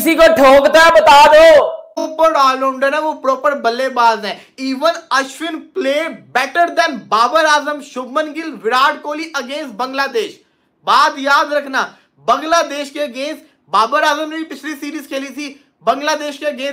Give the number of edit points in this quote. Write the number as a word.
one